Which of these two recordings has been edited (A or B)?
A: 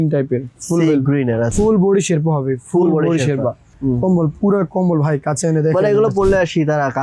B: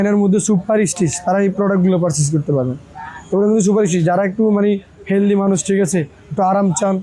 A